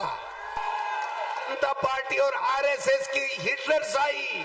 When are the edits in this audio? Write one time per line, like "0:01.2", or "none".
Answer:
0:01.5